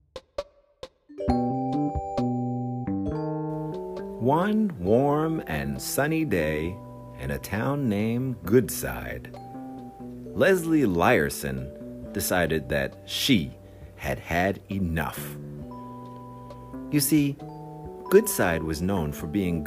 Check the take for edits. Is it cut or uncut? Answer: cut